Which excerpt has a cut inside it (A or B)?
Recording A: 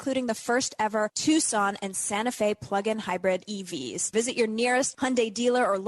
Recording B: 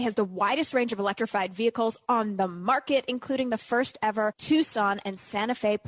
A